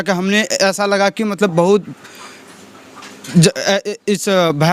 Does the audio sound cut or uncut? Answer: uncut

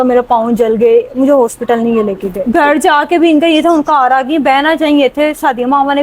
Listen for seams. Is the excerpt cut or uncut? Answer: cut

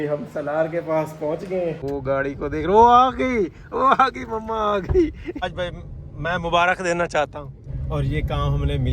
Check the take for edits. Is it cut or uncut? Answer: cut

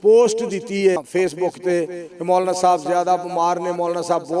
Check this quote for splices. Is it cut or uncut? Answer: cut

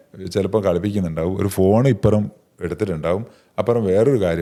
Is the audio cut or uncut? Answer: uncut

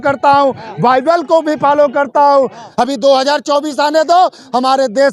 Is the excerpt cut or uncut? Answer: cut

